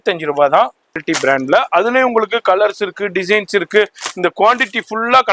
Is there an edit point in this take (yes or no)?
yes